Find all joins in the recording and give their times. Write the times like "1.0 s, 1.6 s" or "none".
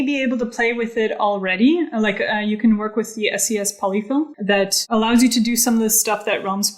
4.3 s